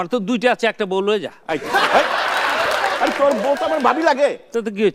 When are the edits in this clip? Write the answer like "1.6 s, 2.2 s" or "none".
2.5 s